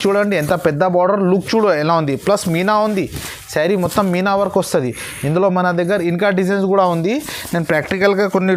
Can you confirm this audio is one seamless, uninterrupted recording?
yes; 0 cuts

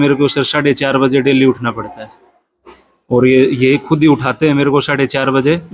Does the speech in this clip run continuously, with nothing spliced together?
yes; 0 cuts

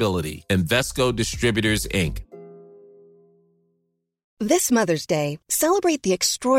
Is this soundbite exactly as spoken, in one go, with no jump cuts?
no; 1 cut; at 4.2 s

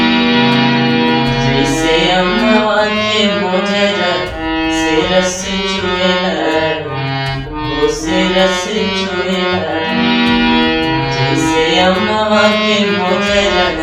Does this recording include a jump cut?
no; 0 cuts

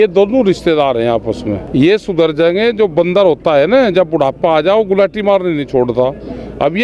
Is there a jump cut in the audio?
yes; 1 cut; at 1.6 s

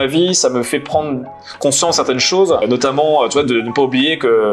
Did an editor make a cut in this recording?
no; 0 cuts

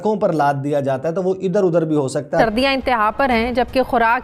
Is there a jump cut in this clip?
yes; 1 cut; at 2.4 s

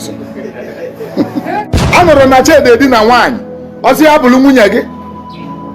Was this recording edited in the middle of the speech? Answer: yes; 1 cut; at 1.5 s

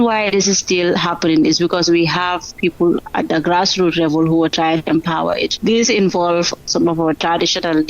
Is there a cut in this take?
yes; 2 cuts; at 3.0 s, 5.5 s

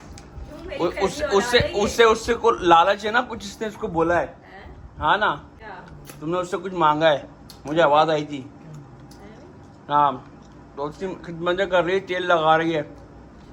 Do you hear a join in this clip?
no; 0 cuts

